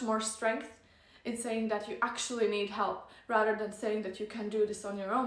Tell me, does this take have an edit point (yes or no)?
no